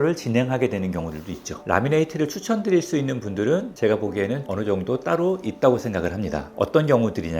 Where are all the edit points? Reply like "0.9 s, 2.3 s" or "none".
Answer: 1.6 s